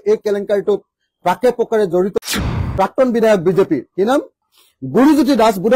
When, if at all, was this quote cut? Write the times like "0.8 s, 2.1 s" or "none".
2.4 s